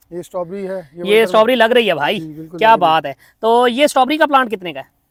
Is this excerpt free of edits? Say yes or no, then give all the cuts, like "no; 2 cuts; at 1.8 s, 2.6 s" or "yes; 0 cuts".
yes; 0 cuts